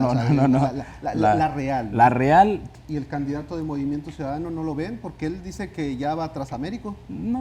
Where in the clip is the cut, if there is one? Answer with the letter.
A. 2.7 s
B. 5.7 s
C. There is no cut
A